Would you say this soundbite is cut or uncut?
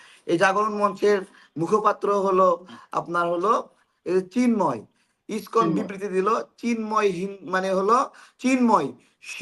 uncut